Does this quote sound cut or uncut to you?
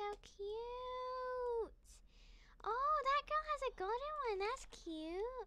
uncut